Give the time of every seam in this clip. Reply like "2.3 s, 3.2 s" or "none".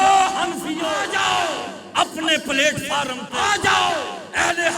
1.1 s, 3.2 s